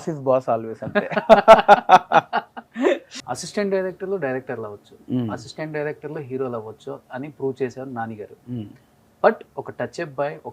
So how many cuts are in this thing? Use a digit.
1